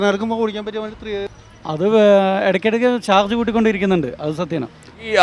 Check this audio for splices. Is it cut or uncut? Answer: cut